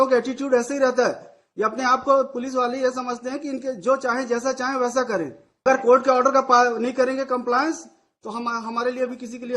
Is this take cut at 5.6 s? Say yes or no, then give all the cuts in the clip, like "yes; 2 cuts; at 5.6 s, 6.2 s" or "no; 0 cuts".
yes; 1 cut; at 5.6 s